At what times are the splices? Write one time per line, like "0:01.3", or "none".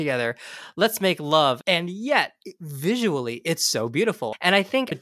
0:01.6
0:04.3